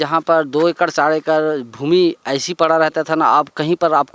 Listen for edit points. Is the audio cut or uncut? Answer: uncut